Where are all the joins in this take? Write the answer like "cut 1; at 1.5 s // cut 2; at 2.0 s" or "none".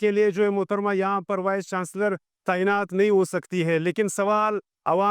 none